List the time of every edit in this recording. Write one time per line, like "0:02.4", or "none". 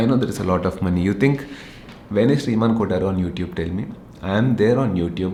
none